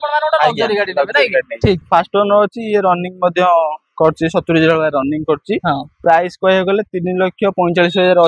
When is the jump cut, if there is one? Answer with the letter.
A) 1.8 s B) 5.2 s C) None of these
A